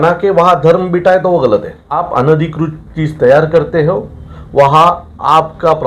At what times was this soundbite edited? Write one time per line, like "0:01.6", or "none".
0:02.1